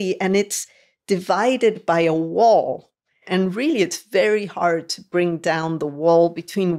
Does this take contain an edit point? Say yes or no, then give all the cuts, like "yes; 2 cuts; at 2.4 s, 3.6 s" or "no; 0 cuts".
yes; 1 cut; at 3.2 s